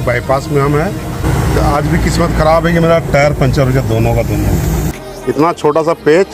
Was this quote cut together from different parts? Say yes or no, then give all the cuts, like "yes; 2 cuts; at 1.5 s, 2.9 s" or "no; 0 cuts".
yes; 2 cuts; at 1.2 s, 5.0 s